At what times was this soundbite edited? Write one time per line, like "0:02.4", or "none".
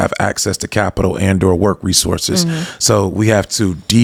none